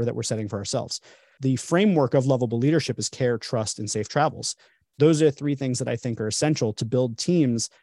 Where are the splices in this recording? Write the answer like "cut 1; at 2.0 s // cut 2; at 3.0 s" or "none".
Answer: cut 1; at 1.4 s